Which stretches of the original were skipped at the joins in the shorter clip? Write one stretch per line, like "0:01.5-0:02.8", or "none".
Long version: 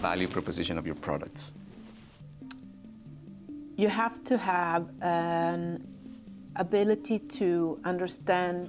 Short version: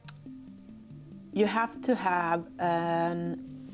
0:03.5-0:03.8